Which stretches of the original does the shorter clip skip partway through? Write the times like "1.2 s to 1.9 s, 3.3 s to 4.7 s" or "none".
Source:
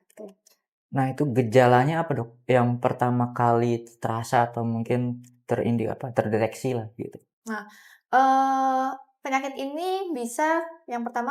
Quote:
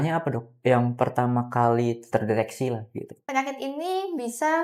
3.9 s to 6.1 s, 7.2 s to 9.1 s